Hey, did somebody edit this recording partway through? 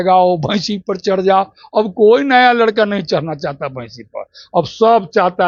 no; 0 cuts

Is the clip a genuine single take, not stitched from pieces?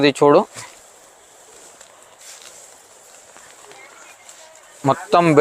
yes; 0 cuts

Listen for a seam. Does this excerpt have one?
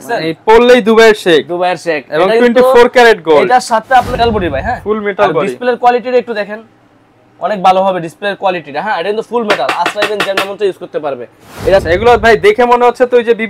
yes; 2 cuts; at 4.2 s, 11.8 s

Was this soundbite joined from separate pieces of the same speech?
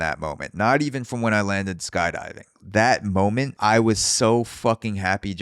yes; 1 cut; at 3.5 s

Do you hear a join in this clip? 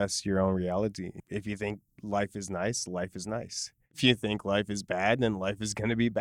yes; 1 cut; at 1.2 s

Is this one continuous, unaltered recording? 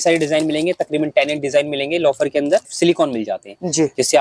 no; 1 cut; at 2.7 s

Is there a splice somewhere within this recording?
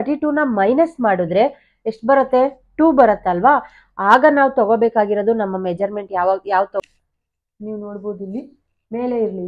yes; 1 cut; at 6.8 s

